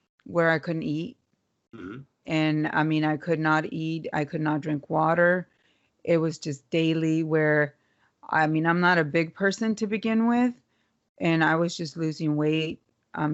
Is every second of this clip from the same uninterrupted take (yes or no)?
yes